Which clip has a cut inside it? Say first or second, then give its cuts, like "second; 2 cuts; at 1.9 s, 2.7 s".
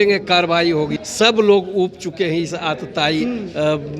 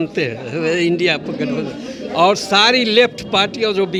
first; 1 cut; at 1.0 s